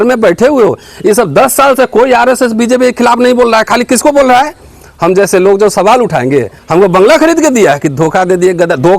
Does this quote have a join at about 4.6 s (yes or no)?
no